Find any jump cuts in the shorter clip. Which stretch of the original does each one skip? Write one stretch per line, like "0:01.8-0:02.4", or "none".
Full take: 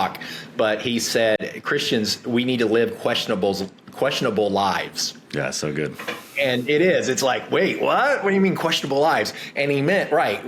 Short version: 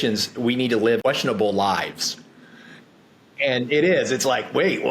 0:02.9-0:04.0